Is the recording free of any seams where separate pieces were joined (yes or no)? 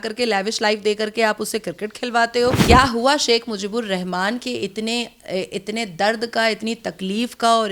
no